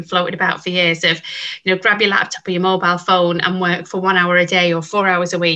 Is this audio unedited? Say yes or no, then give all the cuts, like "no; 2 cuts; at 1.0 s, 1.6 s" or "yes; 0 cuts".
yes; 0 cuts